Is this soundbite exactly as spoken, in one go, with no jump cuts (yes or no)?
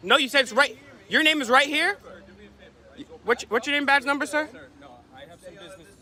yes